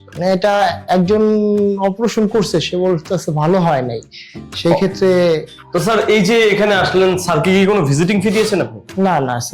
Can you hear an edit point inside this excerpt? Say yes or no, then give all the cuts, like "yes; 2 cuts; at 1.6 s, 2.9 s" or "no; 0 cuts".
yes; 1 cut; at 5.6 s